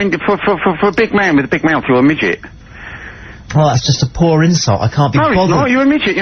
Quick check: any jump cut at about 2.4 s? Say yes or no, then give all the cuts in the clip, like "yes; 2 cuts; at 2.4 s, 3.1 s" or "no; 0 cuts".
no; 1 cut; at 3.8 s